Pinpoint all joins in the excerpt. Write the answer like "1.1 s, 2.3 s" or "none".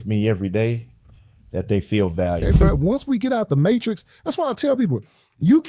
2.4 s